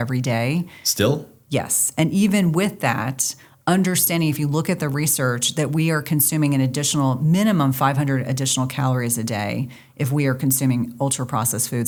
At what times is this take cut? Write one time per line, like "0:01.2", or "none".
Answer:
none